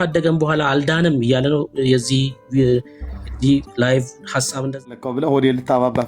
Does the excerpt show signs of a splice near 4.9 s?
yes; 1 cut; at 4.9 s

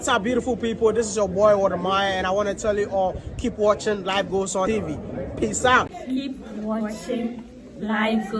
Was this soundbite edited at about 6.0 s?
yes; 2 cuts; at 4.7 s, 6.0 s

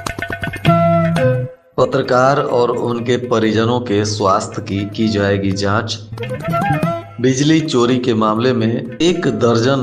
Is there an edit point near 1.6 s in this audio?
yes; 1 cut; at 1.6 s

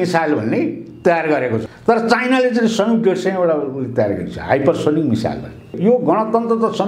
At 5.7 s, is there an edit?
yes; 2 cuts; at 1.6 s, 5.7 s

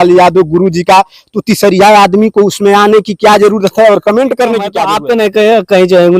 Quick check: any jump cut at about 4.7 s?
yes; 1 cut; at 4.7 s

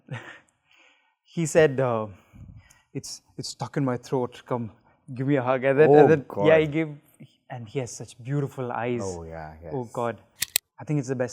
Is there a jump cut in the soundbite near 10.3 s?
yes; 1 cut; at 10.3 s

